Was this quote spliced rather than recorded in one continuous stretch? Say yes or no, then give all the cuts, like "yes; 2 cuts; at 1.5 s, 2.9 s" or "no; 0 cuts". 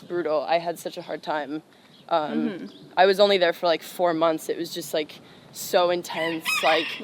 no; 0 cuts